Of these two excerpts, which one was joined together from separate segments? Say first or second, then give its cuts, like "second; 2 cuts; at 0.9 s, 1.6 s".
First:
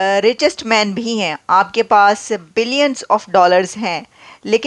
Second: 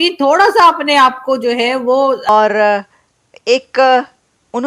second; 1 cut; at 2.3 s